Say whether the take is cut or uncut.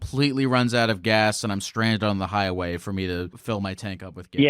cut